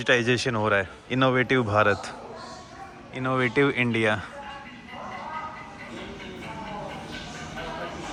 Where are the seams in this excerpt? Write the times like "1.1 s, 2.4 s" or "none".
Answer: none